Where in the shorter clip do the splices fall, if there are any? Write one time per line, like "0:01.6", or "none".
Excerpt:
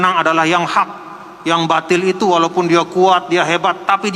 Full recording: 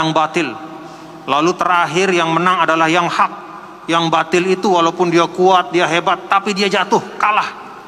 none